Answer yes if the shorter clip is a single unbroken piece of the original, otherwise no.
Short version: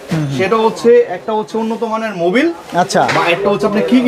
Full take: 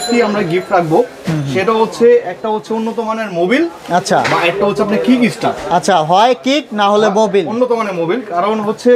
yes